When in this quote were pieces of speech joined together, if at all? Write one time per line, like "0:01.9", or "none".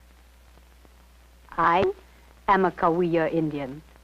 0:02.1